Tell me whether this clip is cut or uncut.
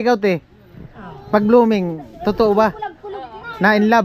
uncut